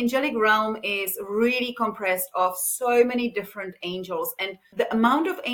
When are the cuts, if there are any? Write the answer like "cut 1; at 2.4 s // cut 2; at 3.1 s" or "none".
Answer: cut 1; at 4.6 s